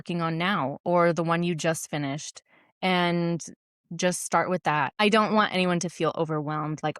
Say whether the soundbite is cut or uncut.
cut